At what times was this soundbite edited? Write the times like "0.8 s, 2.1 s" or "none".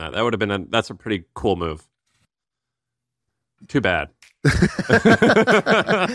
none